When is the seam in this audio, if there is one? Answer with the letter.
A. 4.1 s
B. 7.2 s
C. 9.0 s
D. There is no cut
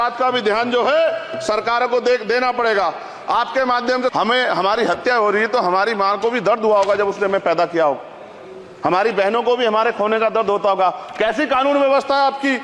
A